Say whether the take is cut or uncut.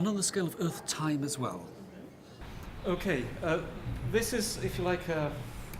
uncut